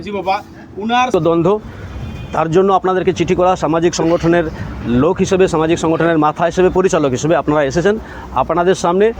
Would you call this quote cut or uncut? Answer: cut